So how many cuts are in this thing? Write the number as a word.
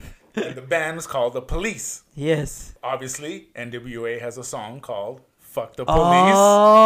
one